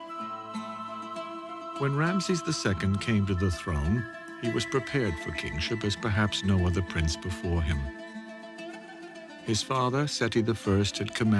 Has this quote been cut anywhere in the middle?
yes; 1 cut; at 1.7 s

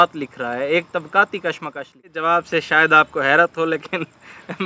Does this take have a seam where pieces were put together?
yes; 1 cut; at 2.2 s

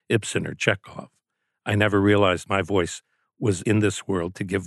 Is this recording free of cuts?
no; 1 cut; at 3.6 s

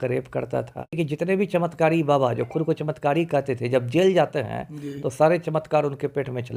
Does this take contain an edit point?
yes; 1 cut; at 1.0 s

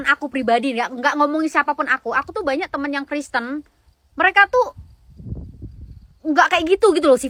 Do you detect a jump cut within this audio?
no; 0 cuts

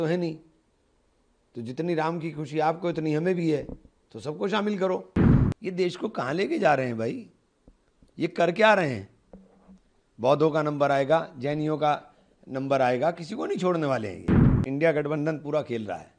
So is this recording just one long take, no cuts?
no; 2 cuts; at 5.1 s, 14.6 s

